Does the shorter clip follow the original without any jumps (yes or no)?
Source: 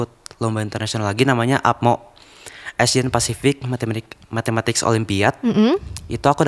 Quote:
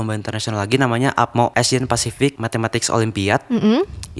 no